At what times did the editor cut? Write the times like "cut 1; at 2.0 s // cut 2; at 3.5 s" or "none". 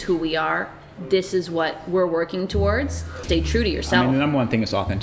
cut 1; at 3.2 s